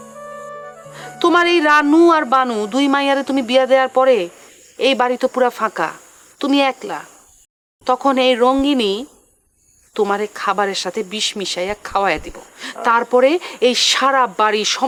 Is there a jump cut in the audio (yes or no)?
no